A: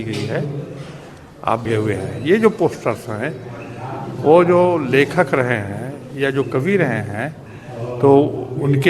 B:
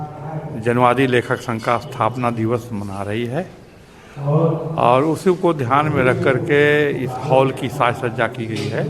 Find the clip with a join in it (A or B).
A